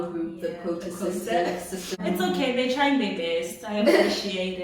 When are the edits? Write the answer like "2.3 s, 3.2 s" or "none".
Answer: 1.9 s